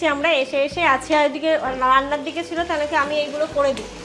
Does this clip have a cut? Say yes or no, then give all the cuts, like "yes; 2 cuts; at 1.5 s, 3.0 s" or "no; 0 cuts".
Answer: no; 0 cuts